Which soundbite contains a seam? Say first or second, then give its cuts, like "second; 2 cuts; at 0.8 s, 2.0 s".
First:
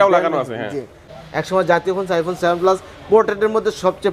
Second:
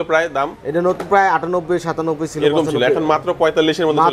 first; 1 cut; at 1.1 s